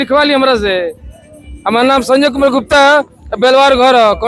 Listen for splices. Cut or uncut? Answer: uncut